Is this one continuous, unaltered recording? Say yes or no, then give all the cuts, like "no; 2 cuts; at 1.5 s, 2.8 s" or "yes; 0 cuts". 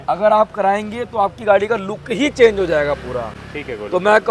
yes; 0 cuts